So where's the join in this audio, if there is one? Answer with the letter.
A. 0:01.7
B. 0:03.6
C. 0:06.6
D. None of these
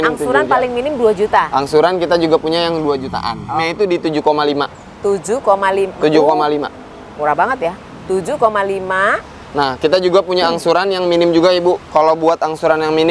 B